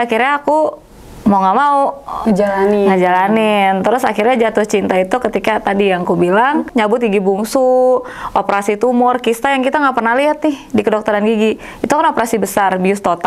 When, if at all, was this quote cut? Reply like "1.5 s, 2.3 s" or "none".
6.7 s